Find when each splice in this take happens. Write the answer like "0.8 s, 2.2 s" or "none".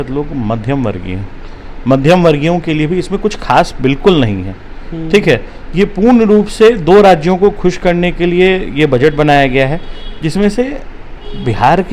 none